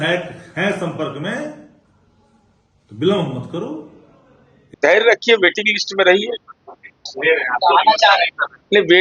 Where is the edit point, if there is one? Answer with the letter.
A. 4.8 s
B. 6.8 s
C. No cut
A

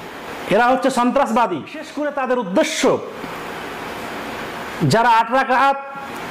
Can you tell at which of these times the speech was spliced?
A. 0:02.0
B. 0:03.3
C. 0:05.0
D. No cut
A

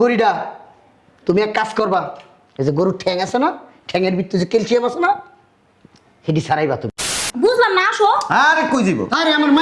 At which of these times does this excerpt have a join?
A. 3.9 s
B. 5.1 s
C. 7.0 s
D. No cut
C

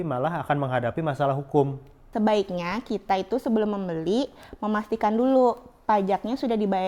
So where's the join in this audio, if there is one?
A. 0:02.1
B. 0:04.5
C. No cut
A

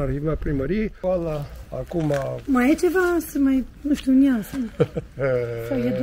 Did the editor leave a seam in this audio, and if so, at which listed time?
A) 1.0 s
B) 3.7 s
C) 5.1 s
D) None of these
A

